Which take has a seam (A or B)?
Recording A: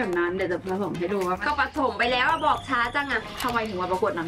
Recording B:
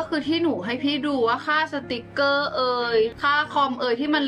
A